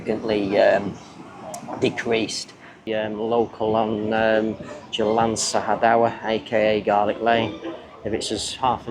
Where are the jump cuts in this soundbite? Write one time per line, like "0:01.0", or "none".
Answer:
0:02.9